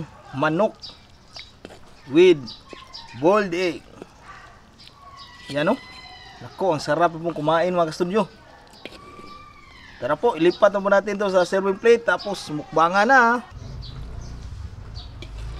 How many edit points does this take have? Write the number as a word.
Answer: one